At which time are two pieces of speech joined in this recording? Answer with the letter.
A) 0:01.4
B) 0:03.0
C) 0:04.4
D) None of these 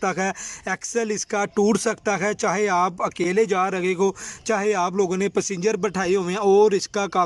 D